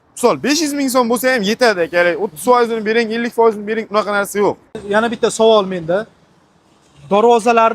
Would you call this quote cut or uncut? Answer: cut